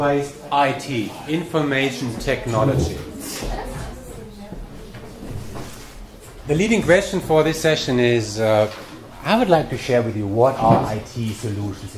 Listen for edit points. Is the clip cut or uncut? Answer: uncut